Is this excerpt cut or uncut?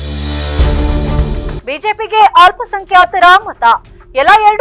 cut